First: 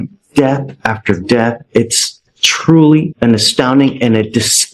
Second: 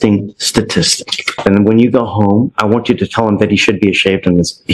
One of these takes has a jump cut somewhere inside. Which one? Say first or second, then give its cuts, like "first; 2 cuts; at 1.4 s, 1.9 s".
second; 1 cut; at 1.4 s